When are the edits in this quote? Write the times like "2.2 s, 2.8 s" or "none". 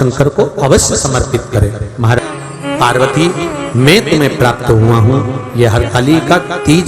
2.2 s

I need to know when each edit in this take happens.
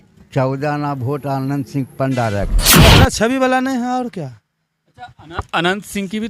2.8 s

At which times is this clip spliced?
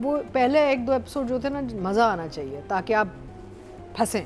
none

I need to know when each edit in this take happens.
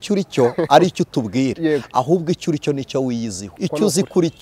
3.4 s

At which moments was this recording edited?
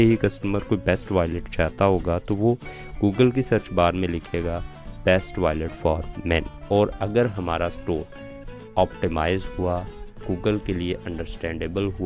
none

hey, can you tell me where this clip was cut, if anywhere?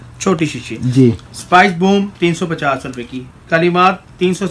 none

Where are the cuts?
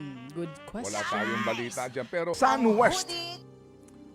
2.3 s

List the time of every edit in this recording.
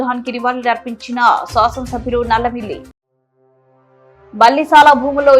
none

